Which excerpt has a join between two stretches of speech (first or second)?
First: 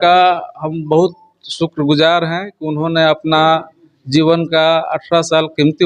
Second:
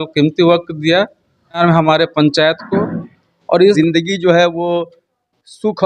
second